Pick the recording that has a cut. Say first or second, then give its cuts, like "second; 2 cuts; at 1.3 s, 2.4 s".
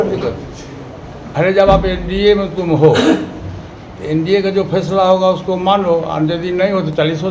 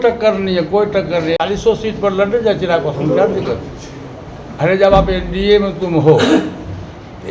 second; 1 cut; at 1.4 s